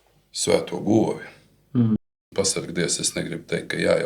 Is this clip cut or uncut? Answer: cut